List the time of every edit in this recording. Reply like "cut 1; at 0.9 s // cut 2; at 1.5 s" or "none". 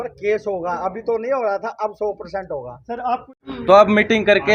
none